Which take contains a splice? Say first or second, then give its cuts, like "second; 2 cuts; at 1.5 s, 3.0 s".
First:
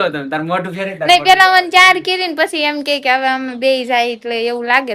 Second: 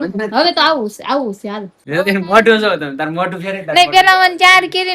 second; 1 cut; at 1.7 s